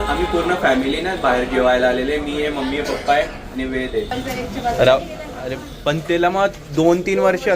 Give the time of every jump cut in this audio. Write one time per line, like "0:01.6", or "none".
0:04.1

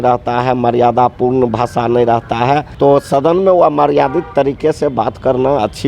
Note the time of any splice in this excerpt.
0:02.7

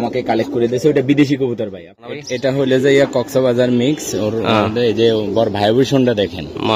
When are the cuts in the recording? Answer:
0:02.3

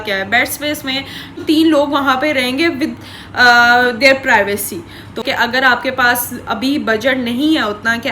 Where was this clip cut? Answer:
0:01.4
0:05.2

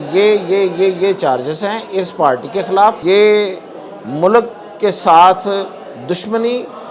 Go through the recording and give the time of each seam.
0:03.0

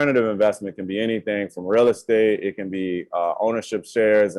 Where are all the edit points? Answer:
none

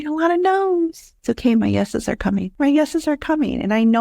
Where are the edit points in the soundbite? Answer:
0:01.1
0:02.5

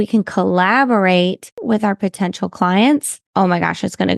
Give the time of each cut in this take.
0:01.6
0:03.2

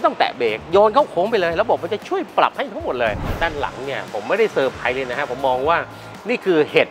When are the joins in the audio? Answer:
0:03.3

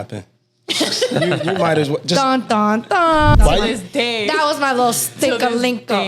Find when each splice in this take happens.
0:03.4

